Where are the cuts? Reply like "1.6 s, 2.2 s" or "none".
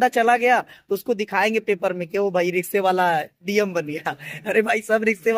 none